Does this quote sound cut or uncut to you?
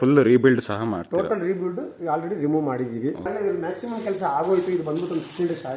cut